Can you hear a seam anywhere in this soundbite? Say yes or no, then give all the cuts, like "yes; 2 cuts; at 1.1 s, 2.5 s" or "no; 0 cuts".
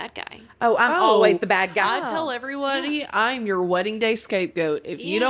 no; 0 cuts